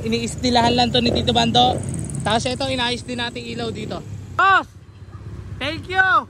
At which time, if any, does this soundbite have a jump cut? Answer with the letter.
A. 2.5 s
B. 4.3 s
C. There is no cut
B